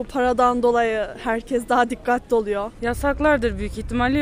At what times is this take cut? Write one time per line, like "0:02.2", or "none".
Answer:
0:02.7